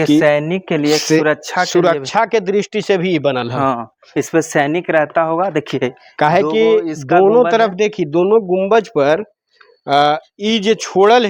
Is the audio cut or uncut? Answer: uncut